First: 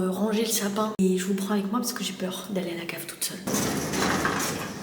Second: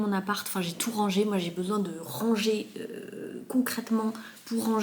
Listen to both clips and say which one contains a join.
first; 2 cuts; at 1.0 s, 3.5 s

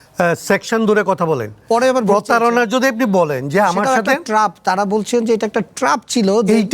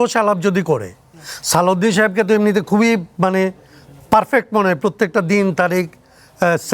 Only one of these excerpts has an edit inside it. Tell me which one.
first; 1 cut; at 1.5 s

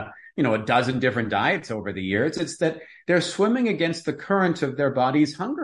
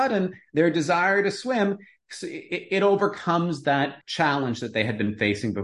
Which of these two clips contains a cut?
second; 1 cut; at 4.0 s

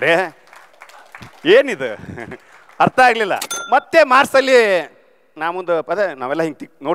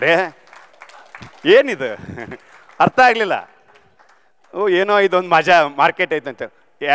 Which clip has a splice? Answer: first; 1 cut; at 3.5 s

